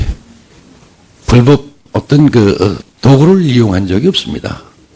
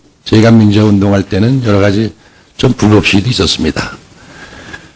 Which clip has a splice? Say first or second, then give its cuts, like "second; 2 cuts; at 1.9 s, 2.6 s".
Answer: first; 1 cut; at 2.9 s